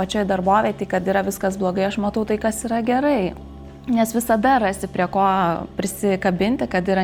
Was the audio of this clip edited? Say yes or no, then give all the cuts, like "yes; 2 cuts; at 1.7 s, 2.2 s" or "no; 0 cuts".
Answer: no; 0 cuts